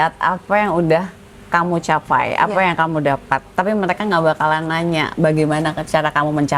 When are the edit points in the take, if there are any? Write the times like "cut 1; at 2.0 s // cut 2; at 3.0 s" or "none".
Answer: none

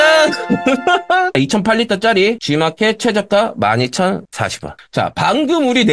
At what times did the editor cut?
cut 1; at 1.3 s

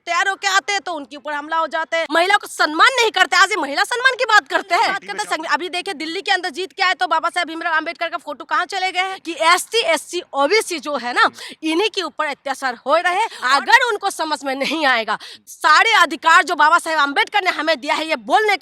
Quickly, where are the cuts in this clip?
cut 1; at 2.1 s // cut 2; at 5.0 s // cut 3; at 9.2 s // cut 4; at 13.4 s // cut 5; at 15.3 s

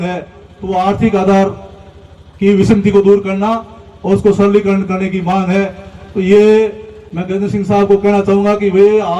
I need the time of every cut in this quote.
none

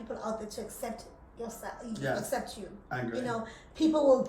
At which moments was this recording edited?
none

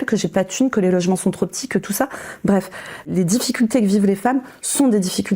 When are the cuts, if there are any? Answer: cut 1; at 3.1 s

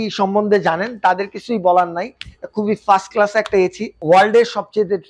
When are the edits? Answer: cut 1; at 3.9 s

